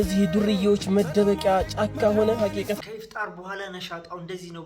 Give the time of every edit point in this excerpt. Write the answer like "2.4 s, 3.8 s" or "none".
2.8 s